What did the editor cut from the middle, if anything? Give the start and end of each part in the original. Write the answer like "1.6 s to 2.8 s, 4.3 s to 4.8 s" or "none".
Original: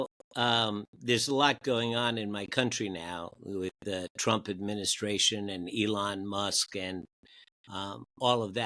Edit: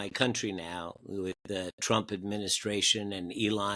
none